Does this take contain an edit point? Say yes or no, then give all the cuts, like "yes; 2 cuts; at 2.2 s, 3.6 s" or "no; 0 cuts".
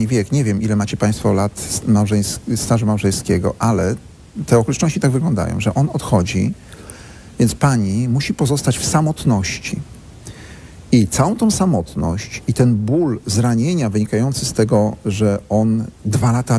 yes; 1 cut; at 8.5 s